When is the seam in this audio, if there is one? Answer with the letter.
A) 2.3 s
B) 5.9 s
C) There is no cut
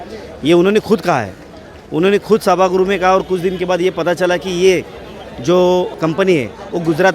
B